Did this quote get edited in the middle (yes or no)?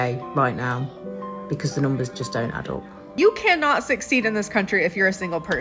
yes